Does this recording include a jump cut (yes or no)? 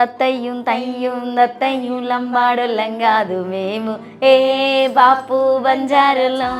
no